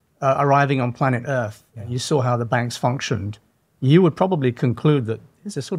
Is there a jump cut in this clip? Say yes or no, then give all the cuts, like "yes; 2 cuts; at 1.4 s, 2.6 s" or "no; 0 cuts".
no; 0 cuts